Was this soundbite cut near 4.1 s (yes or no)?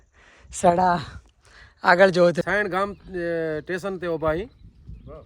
no